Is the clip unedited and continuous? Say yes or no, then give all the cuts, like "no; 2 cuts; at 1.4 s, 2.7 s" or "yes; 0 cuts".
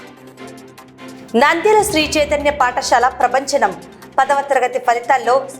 no; 1 cut; at 1.2 s